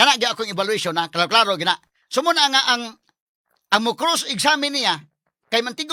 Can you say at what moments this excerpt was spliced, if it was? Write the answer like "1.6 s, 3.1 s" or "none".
none